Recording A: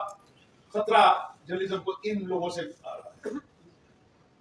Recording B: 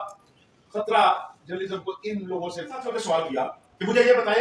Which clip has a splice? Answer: B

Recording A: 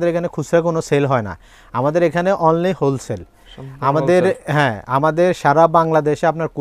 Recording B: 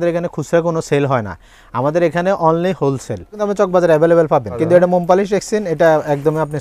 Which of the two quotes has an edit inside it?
B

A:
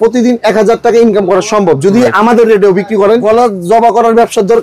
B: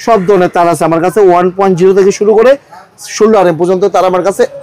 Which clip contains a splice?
A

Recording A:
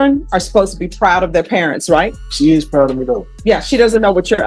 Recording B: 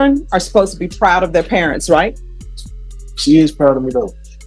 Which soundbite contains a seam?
A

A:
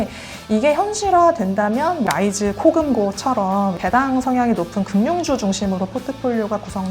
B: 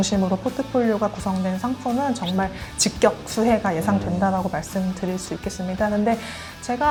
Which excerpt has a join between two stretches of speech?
A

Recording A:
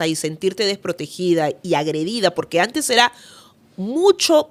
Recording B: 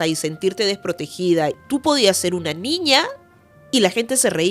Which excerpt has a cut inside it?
B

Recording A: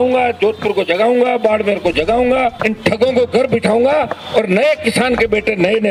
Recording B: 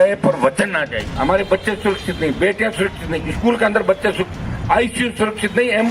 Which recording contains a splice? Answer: B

